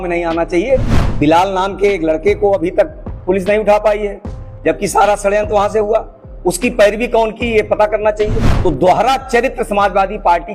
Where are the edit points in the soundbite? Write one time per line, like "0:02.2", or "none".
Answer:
0:01.0
0:08.4

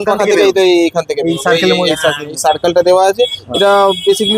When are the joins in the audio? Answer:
none

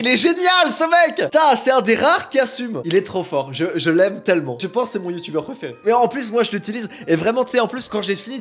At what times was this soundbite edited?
none

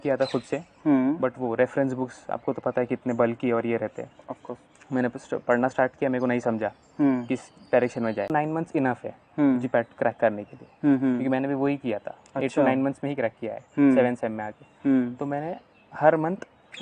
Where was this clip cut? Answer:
0:08.3

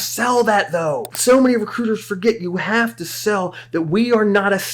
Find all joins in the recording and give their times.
0:01.1

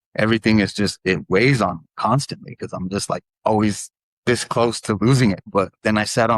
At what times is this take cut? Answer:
0:05.5

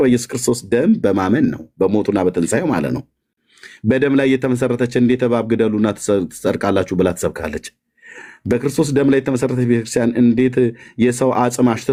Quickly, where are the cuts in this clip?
none

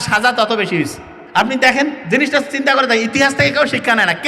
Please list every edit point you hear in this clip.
none

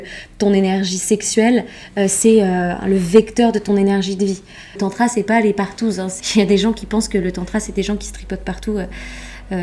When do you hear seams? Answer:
0:04.8
0:06.1

